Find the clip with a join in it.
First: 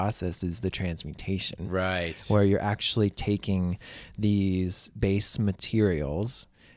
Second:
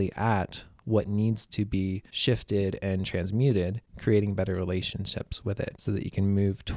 second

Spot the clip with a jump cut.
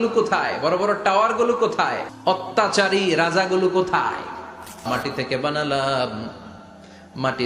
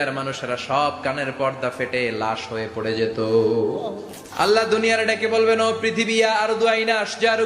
first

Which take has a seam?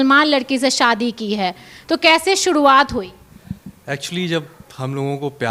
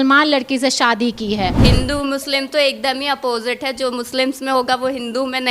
second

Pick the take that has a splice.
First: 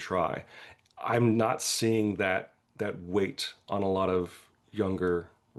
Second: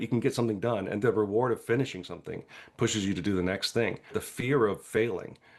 second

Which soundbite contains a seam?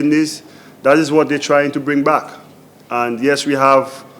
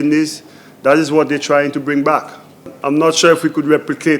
second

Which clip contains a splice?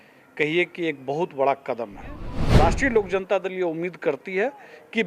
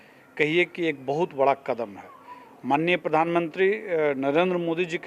first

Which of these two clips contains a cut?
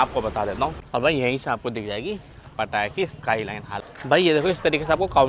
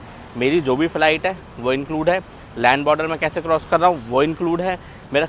first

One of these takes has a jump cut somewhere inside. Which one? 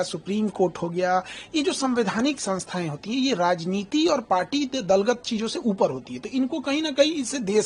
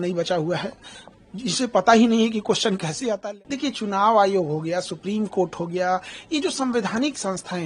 second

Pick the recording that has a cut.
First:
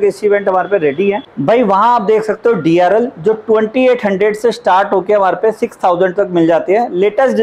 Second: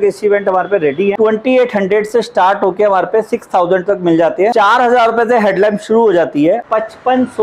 second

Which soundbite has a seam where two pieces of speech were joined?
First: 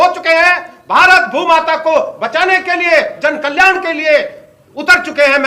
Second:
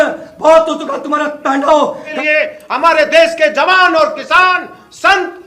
second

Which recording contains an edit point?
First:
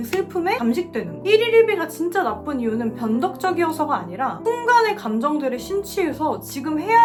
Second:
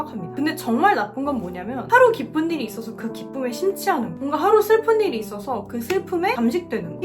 second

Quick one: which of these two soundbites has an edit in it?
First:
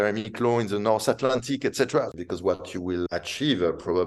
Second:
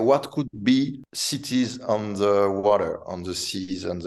first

